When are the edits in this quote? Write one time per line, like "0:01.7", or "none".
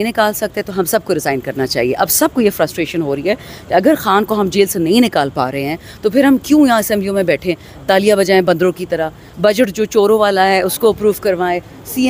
none